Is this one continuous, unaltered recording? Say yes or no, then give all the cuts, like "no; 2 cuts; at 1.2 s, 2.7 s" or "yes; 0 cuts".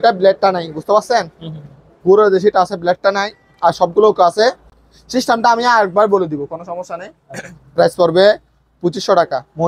yes; 0 cuts